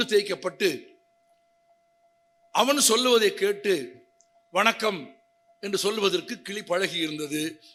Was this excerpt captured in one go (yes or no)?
yes